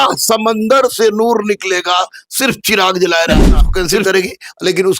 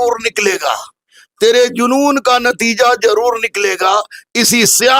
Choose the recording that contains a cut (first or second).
first